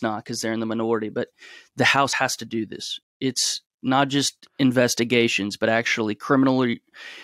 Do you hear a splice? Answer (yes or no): yes